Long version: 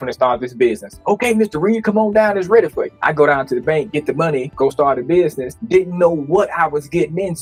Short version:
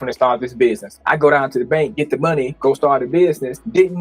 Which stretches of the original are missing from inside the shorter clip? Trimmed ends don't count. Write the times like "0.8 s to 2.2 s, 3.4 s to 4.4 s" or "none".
0.9 s to 2.9 s